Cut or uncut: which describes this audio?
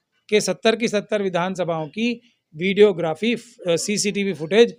uncut